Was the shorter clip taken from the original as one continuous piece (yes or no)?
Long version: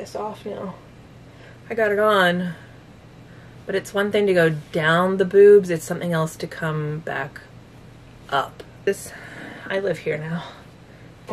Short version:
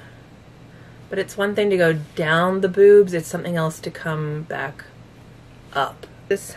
yes